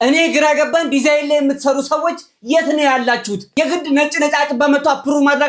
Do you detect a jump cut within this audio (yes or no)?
yes